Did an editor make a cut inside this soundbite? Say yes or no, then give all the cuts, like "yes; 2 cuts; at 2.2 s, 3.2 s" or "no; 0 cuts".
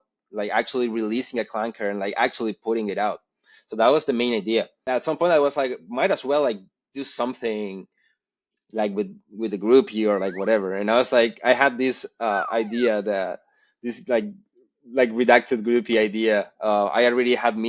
yes; 1 cut; at 4.8 s